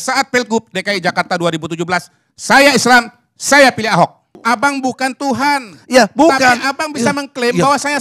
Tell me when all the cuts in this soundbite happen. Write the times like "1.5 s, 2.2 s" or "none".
4.4 s